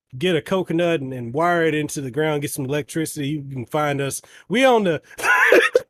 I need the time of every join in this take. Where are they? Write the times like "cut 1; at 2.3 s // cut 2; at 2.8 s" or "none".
none